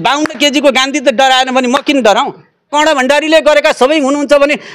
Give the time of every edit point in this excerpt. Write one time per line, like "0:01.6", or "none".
0:02.7